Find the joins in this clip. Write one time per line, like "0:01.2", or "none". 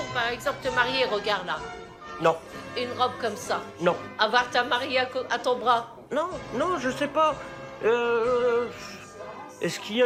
none